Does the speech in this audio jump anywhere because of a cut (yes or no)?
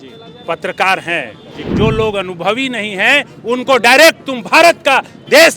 yes